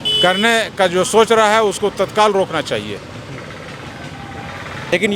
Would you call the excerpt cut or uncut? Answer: uncut